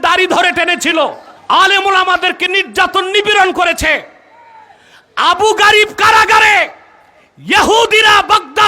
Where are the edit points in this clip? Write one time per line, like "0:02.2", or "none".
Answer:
0:01.3